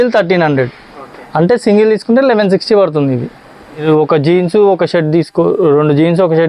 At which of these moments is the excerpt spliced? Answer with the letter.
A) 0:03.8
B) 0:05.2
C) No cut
A